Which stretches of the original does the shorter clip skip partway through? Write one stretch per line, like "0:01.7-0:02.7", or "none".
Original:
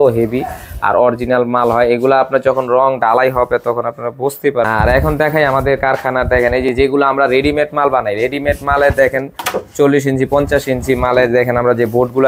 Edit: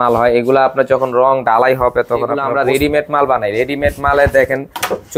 0:04.0-0:07.1